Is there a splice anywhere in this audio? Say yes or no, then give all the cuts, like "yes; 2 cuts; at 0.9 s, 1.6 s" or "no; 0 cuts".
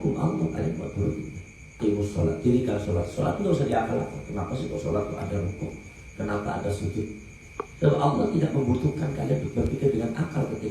yes; 1 cut; at 1.7 s